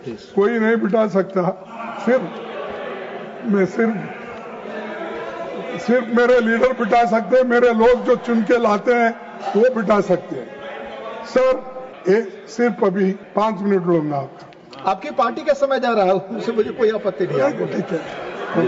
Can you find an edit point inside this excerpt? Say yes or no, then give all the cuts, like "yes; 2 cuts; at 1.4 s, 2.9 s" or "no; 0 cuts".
no; 0 cuts